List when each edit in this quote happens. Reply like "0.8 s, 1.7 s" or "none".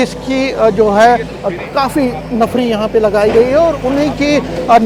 none